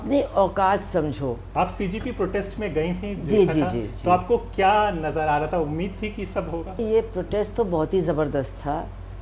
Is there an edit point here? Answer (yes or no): yes